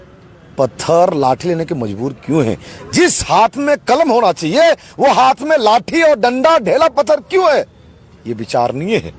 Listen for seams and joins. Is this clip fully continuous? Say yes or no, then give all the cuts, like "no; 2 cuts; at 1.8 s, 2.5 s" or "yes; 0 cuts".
yes; 0 cuts